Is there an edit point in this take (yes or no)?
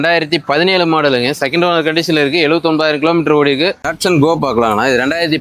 yes